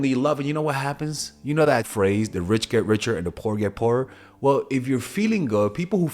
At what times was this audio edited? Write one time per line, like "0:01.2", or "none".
0:01.9